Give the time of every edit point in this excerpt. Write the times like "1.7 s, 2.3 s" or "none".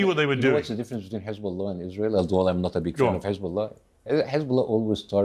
none